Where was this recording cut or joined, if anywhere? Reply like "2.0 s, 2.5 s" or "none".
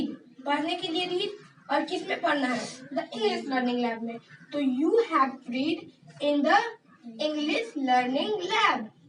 none